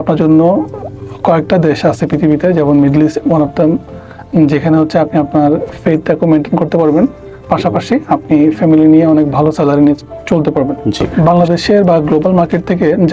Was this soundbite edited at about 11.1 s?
yes; 1 cut; at 11.1 s

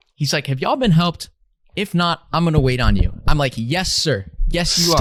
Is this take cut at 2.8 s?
no; 0 cuts

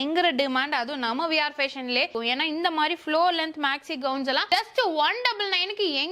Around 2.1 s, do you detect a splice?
yes; 1 cut; at 2.1 s

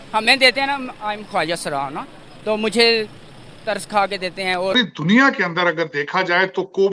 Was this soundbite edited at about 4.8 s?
yes; 1 cut; at 4.8 s

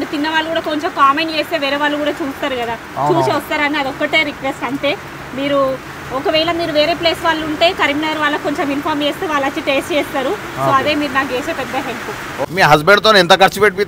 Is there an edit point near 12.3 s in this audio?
yes; 1 cut; at 12.3 s

